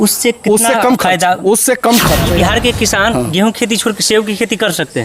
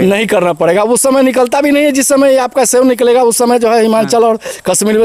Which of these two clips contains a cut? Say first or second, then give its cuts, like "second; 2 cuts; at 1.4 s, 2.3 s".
first; 1 cut; at 2.3 s